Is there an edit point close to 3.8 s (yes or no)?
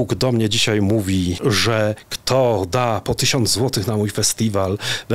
no